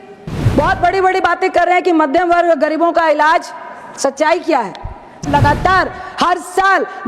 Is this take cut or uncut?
cut